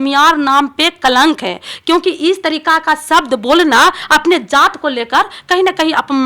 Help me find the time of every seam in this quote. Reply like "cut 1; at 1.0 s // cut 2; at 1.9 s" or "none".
none